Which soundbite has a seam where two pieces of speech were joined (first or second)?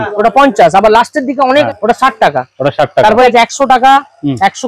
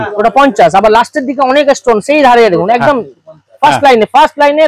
first